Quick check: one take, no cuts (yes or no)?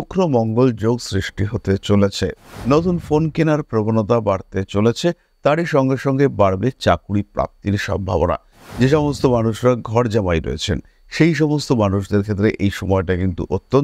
no